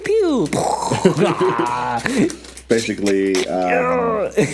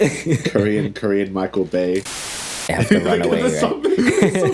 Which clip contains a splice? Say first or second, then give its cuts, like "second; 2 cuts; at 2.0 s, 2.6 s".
second; 1 cut; at 2.4 s